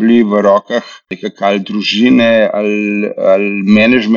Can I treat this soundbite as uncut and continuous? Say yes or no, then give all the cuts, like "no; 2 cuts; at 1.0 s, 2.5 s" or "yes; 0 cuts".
no; 1 cut; at 1.1 s